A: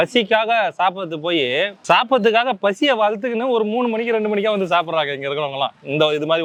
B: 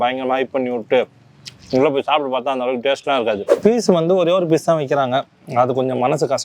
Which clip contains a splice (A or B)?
B